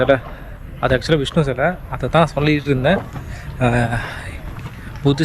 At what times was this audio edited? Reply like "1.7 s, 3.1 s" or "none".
none

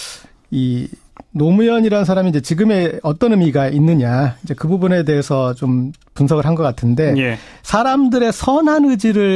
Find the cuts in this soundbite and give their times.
none

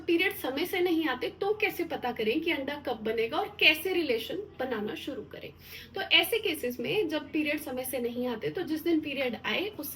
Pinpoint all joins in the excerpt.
none

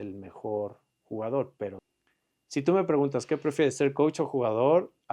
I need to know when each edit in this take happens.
1.8 s

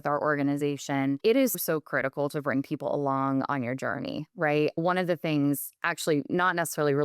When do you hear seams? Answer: 1.2 s

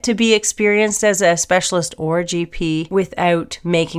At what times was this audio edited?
2.9 s

